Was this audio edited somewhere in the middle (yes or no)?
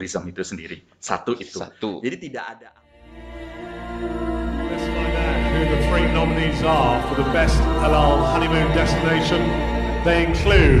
yes